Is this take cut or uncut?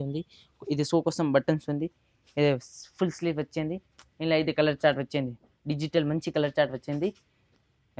uncut